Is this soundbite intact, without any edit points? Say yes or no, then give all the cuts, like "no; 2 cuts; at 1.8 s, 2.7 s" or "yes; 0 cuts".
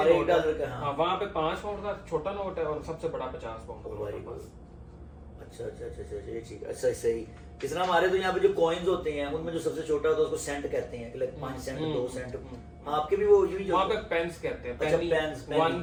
yes; 0 cuts